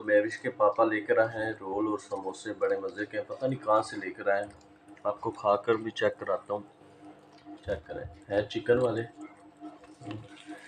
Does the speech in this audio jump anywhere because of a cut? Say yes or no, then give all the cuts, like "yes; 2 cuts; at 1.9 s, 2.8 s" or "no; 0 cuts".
no; 0 cuts